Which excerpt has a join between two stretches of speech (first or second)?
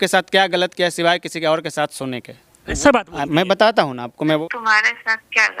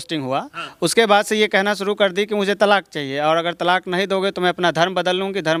first